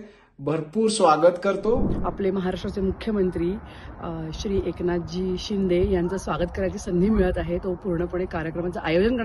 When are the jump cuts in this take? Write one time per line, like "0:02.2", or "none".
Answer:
0:01.9